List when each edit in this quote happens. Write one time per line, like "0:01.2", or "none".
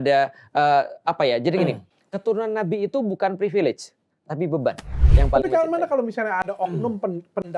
0:05.1

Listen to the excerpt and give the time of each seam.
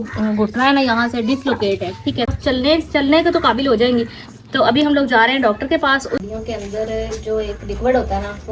0:02.4
0:06.2

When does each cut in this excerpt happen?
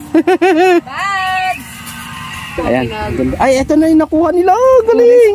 0:02.9

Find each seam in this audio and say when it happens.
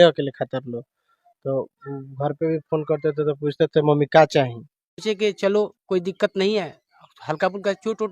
0:05.0

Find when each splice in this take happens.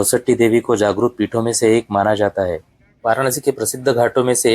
0:02.9

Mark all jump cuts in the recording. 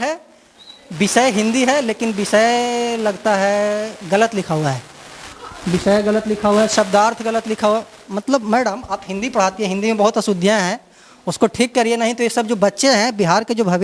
none

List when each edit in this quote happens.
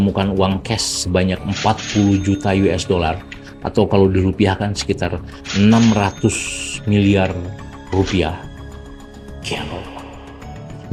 none

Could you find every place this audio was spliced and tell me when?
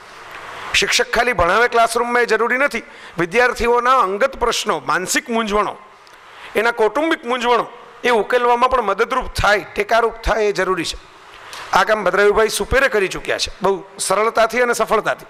none

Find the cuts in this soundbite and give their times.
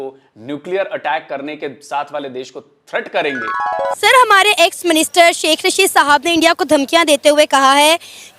0:04.0

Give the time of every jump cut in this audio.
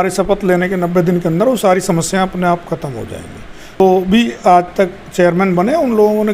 0:03.8

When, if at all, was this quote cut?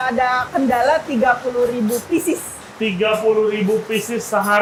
none

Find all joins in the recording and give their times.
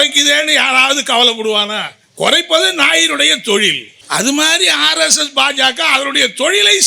0:03.9

